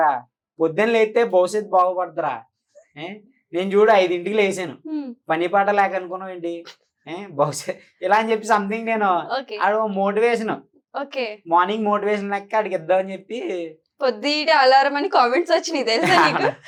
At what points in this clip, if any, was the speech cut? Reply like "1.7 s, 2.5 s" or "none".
none